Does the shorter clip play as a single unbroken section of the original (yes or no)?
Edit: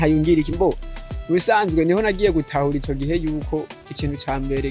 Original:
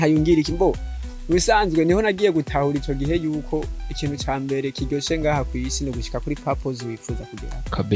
yes